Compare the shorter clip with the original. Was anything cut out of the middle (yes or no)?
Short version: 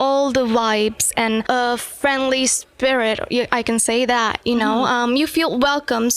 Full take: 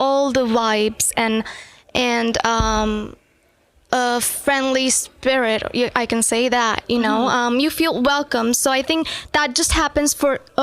yes